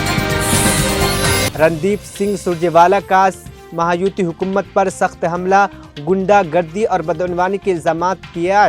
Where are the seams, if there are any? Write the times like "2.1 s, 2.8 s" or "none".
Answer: 1.5 s